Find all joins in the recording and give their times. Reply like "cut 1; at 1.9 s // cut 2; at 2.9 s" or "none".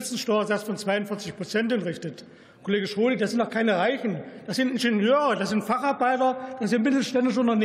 none